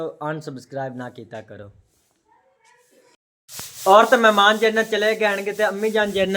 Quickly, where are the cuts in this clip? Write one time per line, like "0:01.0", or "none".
0:03.2